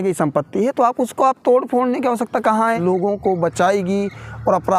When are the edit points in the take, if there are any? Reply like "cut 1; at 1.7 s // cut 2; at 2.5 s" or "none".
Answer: cut 1; at 2.8 s

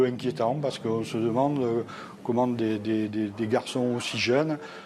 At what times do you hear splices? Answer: none

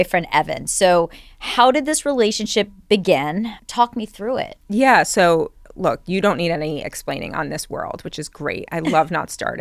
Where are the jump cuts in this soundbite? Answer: cut 1; at 3.6 s

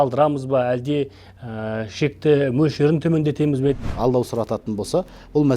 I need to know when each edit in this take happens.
cut 1; at 3.9 s

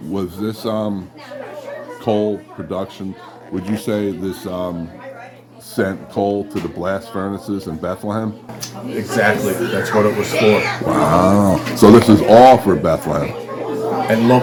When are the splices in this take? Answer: none

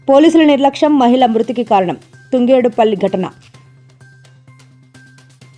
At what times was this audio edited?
none

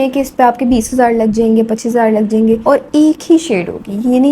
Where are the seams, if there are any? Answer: cut 1; at 2.6 s

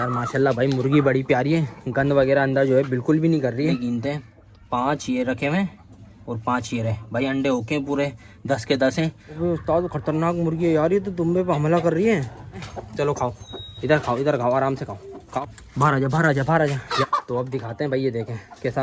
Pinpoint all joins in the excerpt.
cut 1; at 3.7 s // cut 2; at 9.5 s // cut 3; at 12.8 s // cut 4; at 15.4 s // cut 5; at 17.0 s

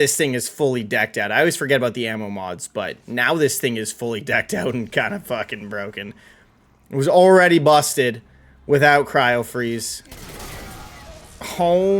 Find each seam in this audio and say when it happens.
none

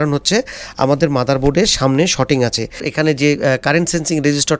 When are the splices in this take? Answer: cut 1; at 2.8 s

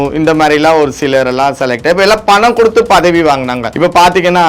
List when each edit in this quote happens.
cut 1; at 3.6 s

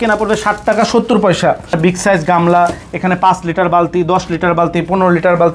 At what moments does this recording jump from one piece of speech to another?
cut 1; at 1.7 s

